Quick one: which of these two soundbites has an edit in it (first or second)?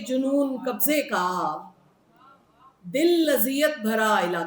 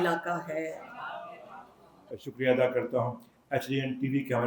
second